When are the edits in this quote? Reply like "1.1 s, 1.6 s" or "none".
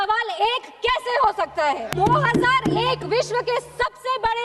1.9 s